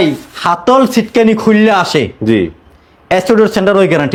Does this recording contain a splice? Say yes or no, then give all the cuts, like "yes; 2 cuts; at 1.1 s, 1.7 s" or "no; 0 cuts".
no; 0 cuts